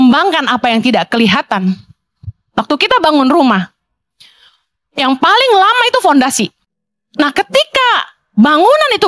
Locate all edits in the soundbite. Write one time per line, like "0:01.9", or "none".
0:06.6